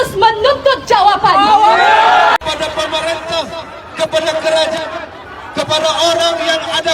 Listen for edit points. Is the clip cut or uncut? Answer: cut